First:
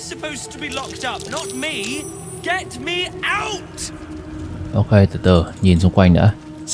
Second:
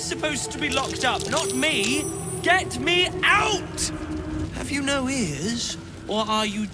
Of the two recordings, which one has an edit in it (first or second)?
second